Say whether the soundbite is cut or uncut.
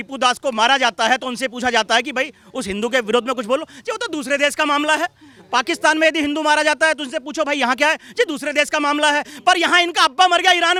uncut